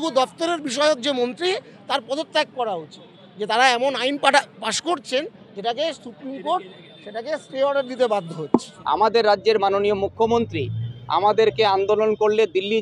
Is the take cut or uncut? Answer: cut